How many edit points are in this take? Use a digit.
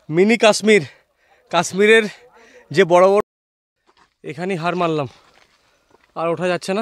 1